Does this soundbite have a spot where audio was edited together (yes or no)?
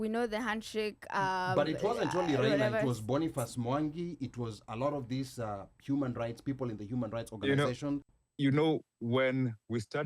yes